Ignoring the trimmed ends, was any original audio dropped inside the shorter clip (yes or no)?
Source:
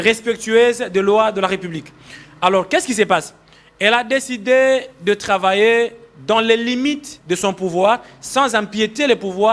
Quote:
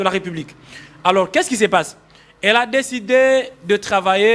no